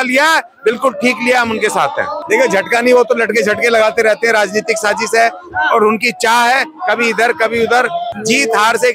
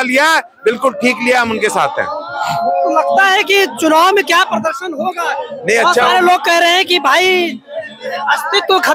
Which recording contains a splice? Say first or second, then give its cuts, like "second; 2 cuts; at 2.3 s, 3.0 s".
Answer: first; 2 cuts; at 2.2 s, 8.1 s